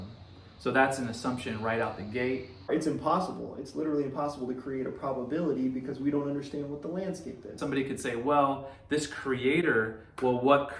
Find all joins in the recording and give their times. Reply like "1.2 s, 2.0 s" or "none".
2.7 s, 7.5 s